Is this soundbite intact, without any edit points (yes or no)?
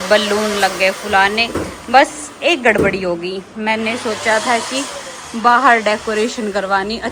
yes